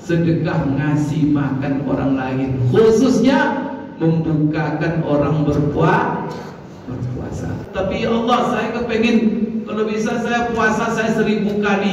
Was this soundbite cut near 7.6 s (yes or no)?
yes